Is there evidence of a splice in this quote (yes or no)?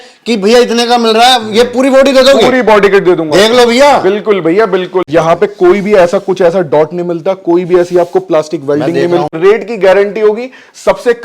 yes